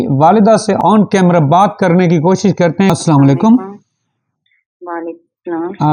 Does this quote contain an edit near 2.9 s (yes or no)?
yes